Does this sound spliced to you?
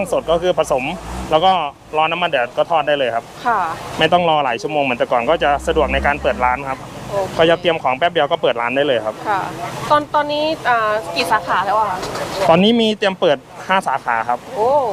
no; 0 cuts

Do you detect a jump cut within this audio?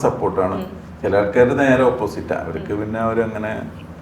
no; 0 cuts

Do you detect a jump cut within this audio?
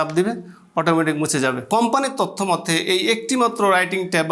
yes; 1 cut; at 1.6 s

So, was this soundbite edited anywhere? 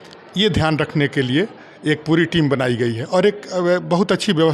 no; 0 cuts

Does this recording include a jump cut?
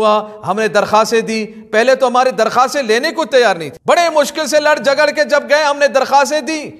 no; 0 cuts

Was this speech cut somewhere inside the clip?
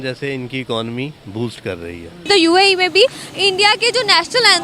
yes; 1 cut; at 2.2 s

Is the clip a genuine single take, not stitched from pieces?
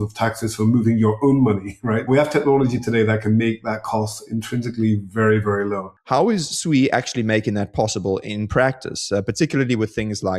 no; 2 cuts; at 2.1 s, 5.9 s

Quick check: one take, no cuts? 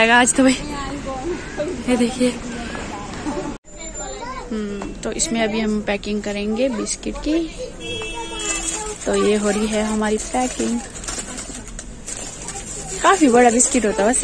no; 1 cut; at 3.7 s

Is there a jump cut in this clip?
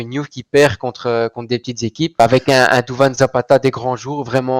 yes; 1 cut; at 2.2 s

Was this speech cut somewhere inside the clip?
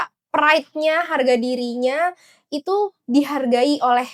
no; 0 cuts

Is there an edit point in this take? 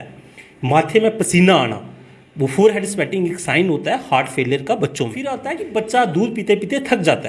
yes; 1 cut; at 5.5 s

